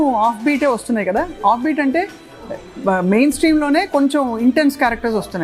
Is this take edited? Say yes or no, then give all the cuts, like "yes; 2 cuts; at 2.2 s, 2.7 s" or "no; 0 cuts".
no; 0 cuts